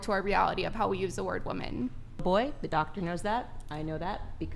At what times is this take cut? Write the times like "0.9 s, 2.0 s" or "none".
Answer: 2.2 s